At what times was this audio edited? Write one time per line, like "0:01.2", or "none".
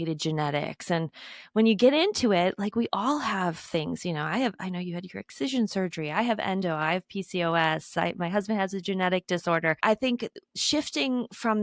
0:09.8